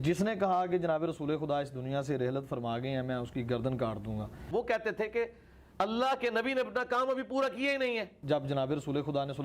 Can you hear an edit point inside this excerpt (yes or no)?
yes